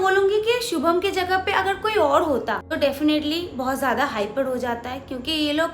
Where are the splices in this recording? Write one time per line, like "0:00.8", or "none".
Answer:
0:02.7